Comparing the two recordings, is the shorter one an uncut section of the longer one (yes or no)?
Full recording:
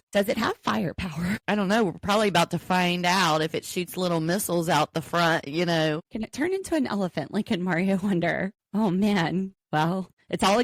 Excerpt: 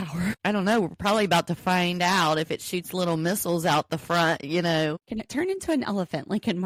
yes